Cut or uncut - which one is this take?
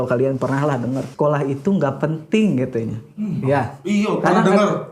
cut